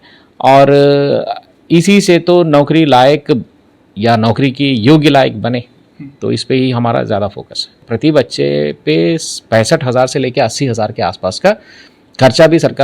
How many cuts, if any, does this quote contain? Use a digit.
1